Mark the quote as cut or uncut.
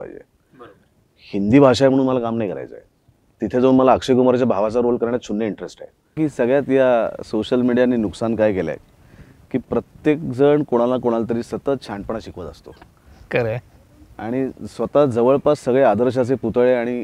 cut